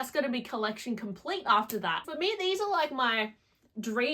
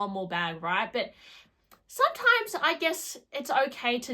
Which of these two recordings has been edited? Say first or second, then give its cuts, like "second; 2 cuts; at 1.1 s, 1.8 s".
first; 1 cut; at 2.1 s